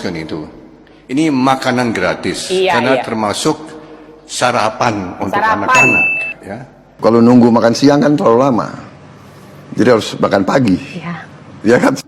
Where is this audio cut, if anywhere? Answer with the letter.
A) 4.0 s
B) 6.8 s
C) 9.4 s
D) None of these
B